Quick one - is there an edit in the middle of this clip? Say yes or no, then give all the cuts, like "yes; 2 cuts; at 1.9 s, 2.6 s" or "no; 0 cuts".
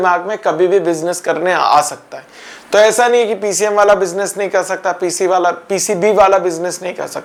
no; 0 cuts